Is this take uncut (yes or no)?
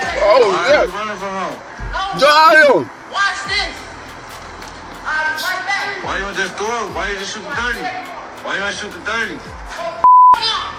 yes